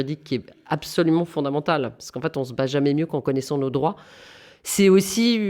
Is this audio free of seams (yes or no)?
yes